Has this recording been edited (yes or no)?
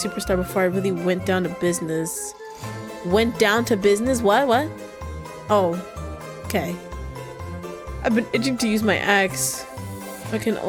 no